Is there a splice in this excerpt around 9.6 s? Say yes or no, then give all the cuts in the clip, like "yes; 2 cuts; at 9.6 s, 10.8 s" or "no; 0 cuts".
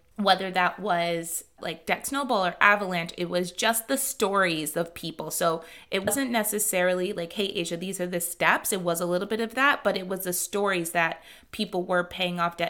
no; 1 cut; at 6.1 s